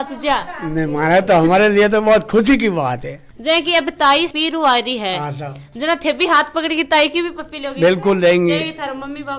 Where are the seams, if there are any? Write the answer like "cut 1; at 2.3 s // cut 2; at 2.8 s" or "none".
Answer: cut 1; at 3.3 s // cut 2; at 4.3 s